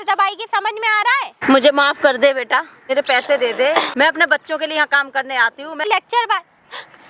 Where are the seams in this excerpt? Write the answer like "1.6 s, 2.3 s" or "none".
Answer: 1.4 s, 2.8 s, 3.9 s, 5.8 s

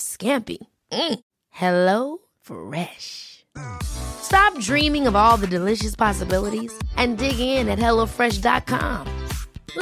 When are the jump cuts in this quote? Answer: none

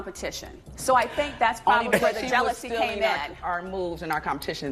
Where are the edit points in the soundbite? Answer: none

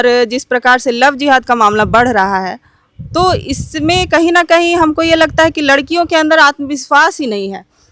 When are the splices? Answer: none

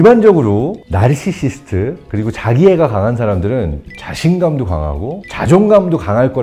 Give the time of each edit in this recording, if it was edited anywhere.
none

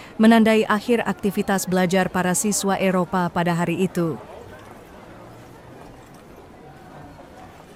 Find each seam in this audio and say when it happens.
none

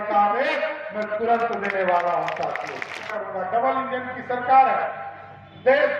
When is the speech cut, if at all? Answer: 3.1 s

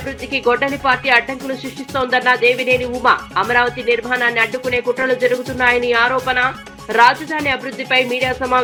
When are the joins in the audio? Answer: none

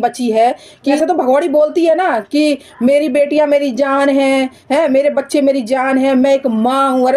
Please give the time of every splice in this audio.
1.0 s

